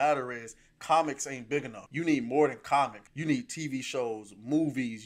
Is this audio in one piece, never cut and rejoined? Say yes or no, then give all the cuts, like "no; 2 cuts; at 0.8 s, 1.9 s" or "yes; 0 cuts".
no; 2 cuts; at 1.8 s, 3.1 s